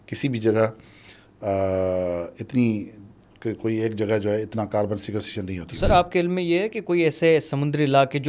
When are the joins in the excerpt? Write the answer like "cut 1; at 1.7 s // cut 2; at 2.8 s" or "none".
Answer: none